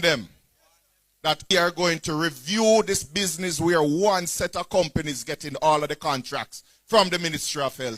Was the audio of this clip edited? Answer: yes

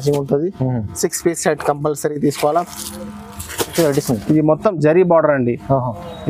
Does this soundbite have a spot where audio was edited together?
yes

